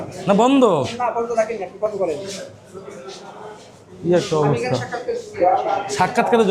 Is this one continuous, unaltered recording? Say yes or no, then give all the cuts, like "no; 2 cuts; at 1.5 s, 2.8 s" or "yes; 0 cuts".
yes; 0 cuts